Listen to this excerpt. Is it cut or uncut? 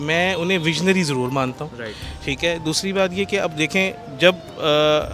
uncut